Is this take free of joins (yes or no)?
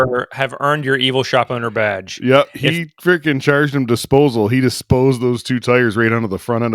yes